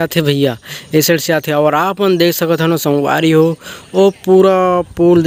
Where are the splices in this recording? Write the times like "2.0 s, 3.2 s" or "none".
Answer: none